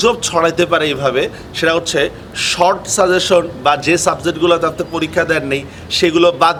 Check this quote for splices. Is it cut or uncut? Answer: uncut